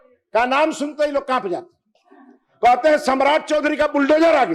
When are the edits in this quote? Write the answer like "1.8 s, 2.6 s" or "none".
none